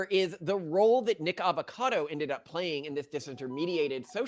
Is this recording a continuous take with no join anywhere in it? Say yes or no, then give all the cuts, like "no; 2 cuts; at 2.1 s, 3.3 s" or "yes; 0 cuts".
yes; 0 cuts